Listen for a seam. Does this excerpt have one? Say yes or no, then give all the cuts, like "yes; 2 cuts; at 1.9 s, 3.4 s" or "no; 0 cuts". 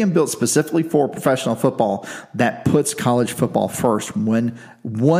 no; 0 cuts